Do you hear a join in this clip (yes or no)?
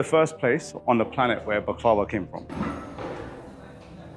yes